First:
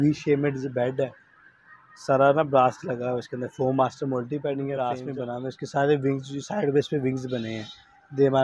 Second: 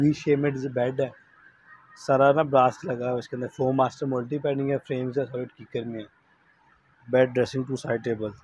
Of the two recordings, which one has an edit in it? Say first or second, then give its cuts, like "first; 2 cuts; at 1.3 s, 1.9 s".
first; 1 cut; at 5.1 s